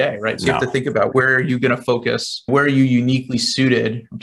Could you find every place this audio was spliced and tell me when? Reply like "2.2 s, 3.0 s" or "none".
1.1 s, 2.5 s